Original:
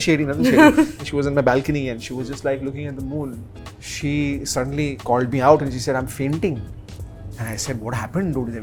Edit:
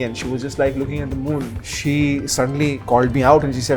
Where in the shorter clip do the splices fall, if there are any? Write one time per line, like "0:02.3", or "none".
0:01.6